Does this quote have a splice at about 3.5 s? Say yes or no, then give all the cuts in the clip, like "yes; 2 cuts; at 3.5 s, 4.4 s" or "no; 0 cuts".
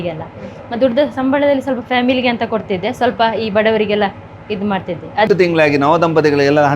no; 1 cut; at 5.3 s